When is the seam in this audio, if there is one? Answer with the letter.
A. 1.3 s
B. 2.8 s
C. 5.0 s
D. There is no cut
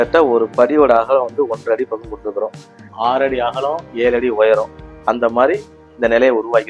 B